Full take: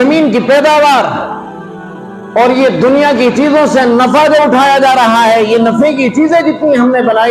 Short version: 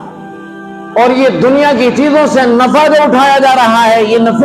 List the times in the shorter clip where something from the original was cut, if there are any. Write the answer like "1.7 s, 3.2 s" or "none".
none